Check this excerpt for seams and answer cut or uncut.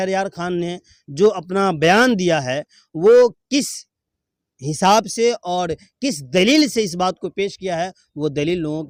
uncut